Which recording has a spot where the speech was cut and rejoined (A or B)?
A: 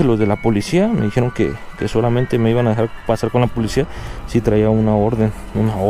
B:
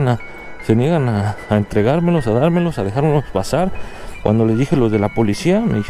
B